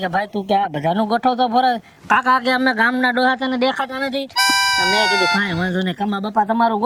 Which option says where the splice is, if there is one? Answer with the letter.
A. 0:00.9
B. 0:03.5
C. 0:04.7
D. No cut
D